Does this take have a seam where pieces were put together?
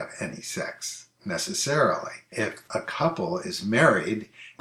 yes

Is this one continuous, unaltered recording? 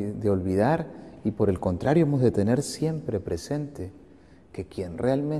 yes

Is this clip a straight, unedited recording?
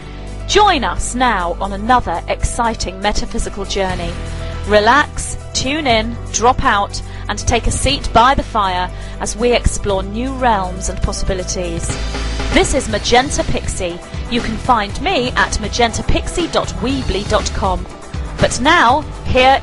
yes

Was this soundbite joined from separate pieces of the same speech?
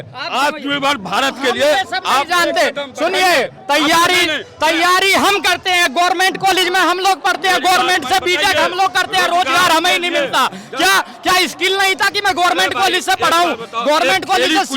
no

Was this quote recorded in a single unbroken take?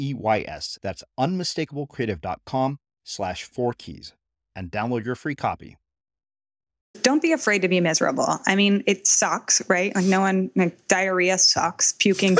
no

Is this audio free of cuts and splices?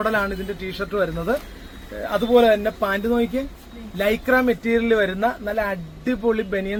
yes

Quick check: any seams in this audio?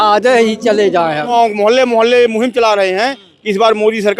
yes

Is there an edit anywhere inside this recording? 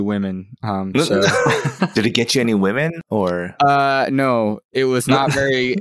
yes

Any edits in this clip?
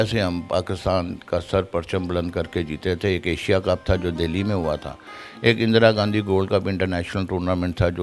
no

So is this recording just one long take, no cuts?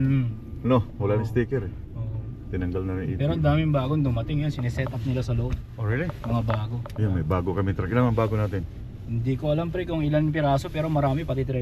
yes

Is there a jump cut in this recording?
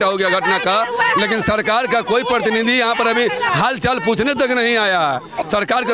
no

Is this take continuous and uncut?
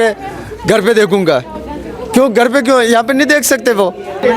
yes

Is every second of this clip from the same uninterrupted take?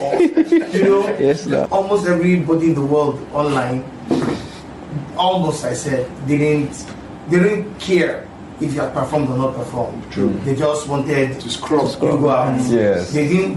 no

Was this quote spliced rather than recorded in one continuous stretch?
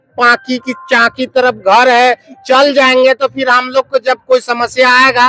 no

